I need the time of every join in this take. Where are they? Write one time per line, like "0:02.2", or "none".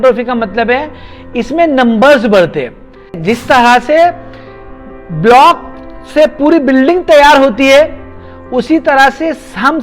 0:03.2